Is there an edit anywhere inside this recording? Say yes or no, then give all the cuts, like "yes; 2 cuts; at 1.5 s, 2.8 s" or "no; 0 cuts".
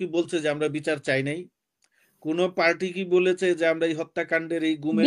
no; 0 cuts